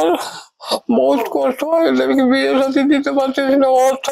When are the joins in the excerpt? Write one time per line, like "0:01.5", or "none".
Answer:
none